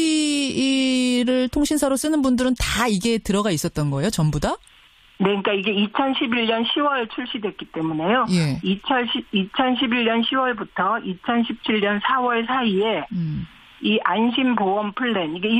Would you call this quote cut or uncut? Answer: uncut